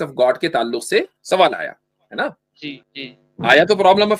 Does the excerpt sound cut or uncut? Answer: cut